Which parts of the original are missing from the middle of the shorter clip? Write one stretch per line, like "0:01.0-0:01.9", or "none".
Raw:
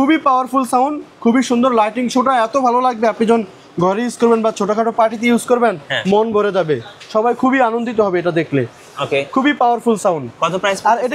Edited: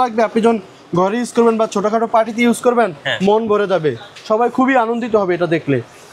none